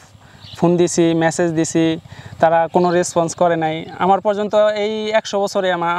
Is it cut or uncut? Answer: uncut